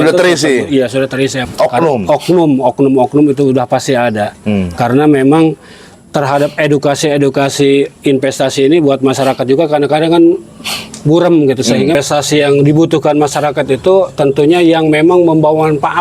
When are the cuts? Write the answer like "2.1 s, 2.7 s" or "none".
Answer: 1.5 s, 11.9 s